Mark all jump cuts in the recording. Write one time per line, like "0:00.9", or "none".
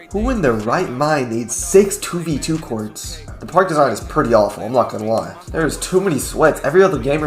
0:05.3

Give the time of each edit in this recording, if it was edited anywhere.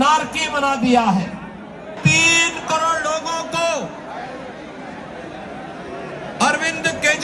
0:02.0

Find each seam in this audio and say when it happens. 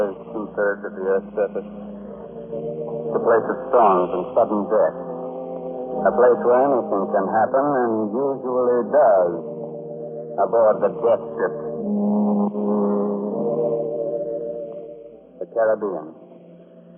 none

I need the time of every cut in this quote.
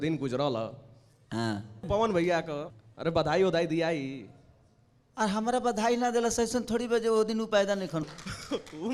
0:01.8
0:02.7
0:08.0

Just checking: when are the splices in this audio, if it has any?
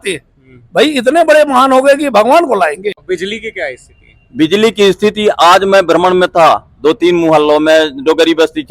0:03.0

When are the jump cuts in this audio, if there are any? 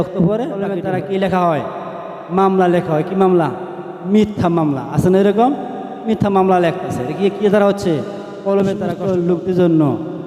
0:00.7
0:09.0

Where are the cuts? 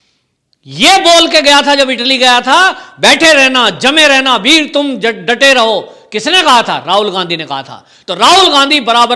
none

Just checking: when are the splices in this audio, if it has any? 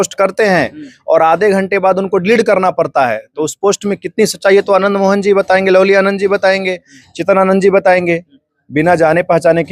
none

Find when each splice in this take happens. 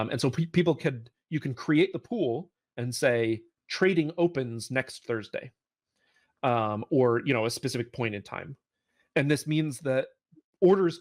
none

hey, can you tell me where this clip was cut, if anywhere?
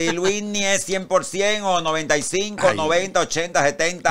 none

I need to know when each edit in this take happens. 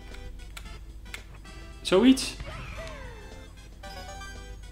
none

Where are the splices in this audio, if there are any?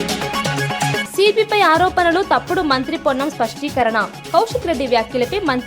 0:01.0

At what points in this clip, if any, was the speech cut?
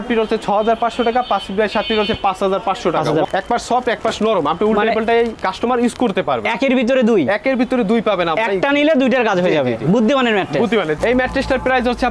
0:03.3
0:11.0

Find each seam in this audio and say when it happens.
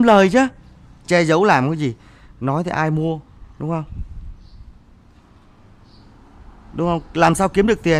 none

